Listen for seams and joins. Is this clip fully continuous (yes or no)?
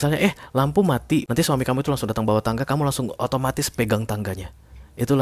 no